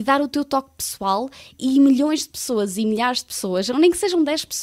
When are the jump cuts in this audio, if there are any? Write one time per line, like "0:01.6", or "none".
none